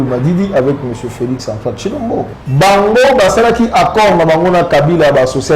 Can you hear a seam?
yes; 1 cut; at 2.4 s

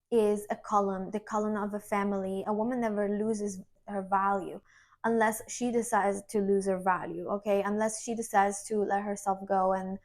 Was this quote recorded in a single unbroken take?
no; 1 cut; at 3.7 s

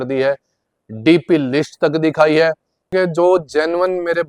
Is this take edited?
yes; 1 cut; at 2.9 s

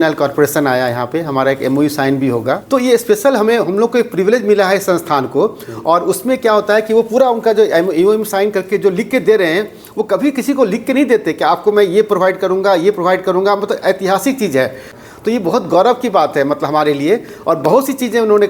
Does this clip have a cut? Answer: no; 0 cuts

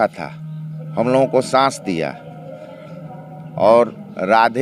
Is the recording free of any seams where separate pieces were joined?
yes; 0 cuts

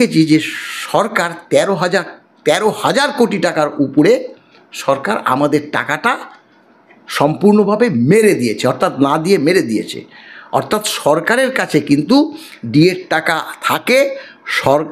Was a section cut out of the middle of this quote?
no; 0 cuts

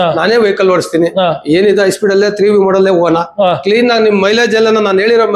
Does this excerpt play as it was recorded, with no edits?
yes; 0 cuts

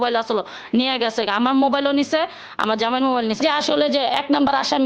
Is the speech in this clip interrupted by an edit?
yes; 1 cut; at 3.4 s

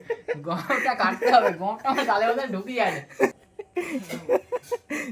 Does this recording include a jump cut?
yes; 1 cut; at 3.3 s

